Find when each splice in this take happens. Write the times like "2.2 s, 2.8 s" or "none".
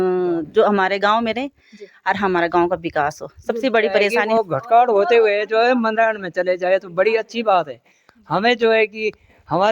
4.3 s